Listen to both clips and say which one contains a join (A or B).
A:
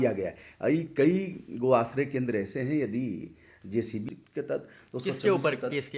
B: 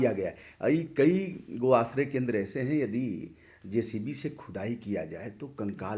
A